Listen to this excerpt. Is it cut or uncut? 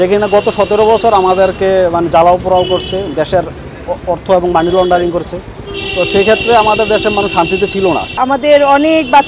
cut